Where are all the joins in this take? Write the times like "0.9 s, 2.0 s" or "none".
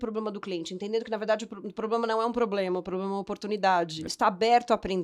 4.0 s